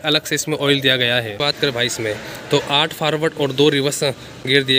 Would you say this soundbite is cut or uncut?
cut